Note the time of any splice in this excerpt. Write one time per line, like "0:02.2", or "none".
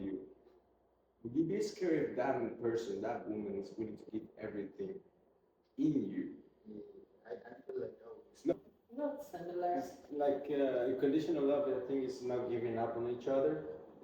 0:08.6